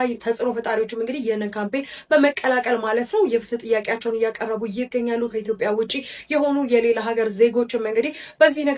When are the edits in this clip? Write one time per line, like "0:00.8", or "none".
none